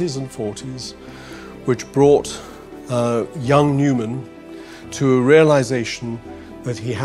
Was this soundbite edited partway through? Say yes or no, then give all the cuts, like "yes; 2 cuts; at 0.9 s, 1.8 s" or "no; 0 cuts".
no; 0 cuts